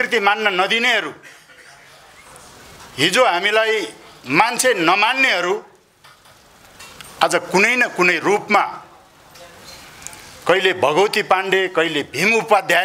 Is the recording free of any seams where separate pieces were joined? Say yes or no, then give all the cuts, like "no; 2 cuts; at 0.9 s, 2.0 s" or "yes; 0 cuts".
yes; 0 cuts